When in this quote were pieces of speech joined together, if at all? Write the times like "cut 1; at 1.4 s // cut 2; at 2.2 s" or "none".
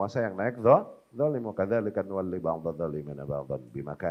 none